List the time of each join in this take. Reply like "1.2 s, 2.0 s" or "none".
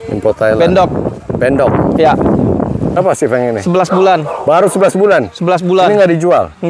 3.0 s